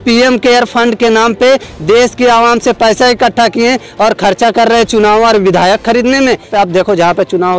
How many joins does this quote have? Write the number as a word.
one